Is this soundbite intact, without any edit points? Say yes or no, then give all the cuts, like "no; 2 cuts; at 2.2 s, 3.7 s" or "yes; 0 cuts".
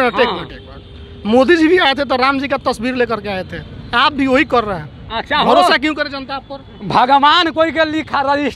yes; 0 cuts